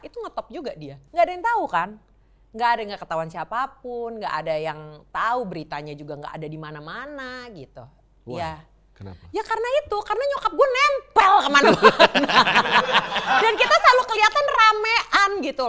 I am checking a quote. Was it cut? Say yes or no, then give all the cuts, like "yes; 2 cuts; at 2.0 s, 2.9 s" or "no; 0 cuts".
yes; 1 cut; at 0.9 s